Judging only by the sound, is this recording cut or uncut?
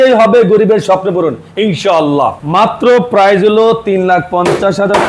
cut